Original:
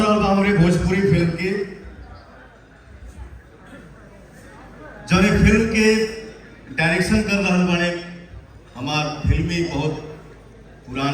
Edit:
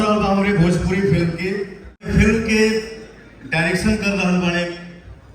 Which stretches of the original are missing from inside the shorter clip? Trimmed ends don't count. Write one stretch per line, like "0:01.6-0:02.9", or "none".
0:02.1-0:05.3